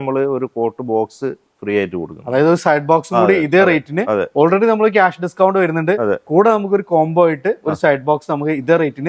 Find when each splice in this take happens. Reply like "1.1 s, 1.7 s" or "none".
none